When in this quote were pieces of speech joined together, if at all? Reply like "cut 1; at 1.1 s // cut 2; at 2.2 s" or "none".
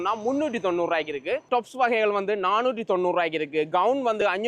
none